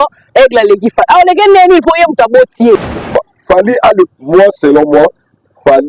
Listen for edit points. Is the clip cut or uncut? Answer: cut